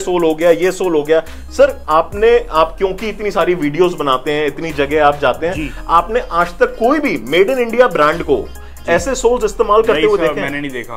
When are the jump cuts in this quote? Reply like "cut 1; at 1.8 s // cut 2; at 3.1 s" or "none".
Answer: none